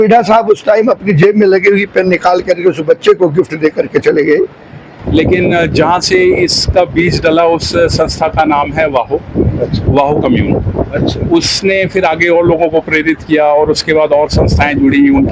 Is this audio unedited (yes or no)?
no